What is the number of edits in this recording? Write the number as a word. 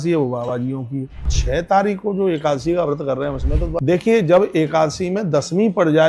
two